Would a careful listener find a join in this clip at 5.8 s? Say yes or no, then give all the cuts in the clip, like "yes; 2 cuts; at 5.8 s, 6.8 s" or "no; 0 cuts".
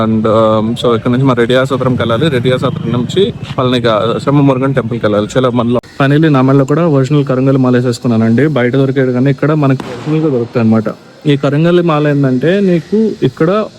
yes; 1 cut; at 5.8 s